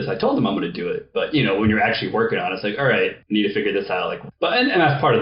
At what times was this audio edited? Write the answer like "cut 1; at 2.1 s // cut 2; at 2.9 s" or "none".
cut 1; at 3.2 s // cut 2; at 4.2 s